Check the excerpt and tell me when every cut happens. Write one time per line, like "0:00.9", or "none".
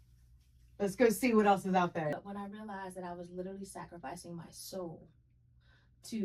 0:02.1